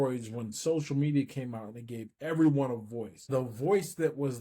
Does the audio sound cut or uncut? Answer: cut